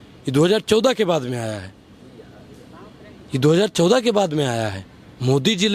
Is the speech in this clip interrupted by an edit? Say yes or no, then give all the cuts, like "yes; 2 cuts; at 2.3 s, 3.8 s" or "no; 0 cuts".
no; 0 cuts